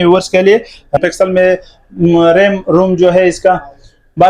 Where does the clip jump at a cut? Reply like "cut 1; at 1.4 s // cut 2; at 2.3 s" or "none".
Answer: cut 1; at 1.0 s